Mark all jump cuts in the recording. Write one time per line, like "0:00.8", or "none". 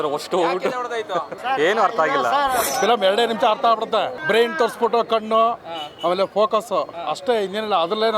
0:01.4
0:02.6
0:04.1

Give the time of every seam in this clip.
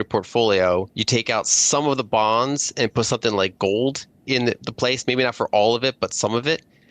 0:01.0

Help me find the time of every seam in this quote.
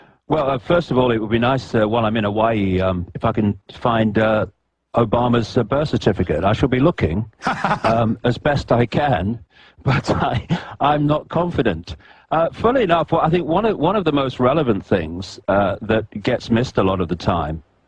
none

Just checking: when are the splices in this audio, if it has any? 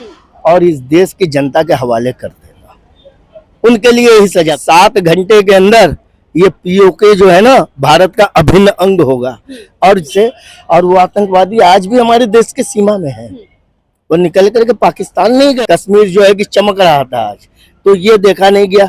0:04.6
0:10.1
0:15.6

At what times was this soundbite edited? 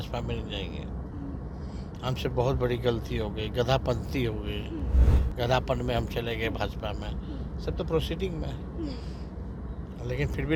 none

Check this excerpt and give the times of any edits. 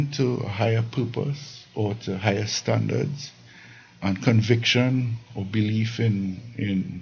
none

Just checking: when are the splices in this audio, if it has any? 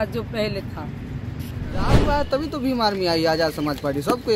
0:01.9

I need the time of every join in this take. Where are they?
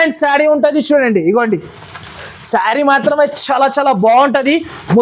none

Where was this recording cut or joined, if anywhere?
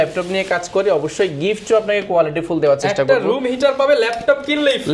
none

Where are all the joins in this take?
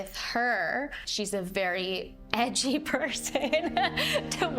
0:01.0

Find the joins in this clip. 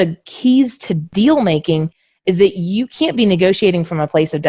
0:01.0

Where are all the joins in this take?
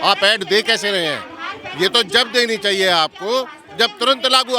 none

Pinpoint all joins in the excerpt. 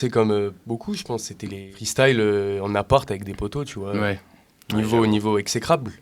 none

